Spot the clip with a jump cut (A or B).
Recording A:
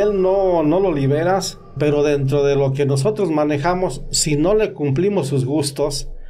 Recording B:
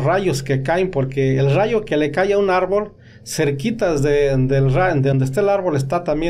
A